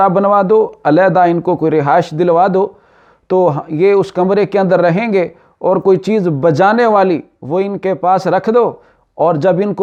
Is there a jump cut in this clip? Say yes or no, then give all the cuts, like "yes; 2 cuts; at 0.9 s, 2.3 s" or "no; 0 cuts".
no; 0 cuts